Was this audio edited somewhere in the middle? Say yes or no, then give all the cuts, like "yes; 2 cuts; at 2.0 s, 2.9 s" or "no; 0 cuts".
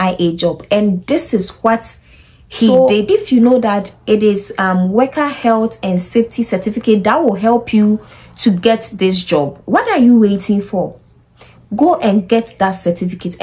yes; 1 cut; at 2.7 s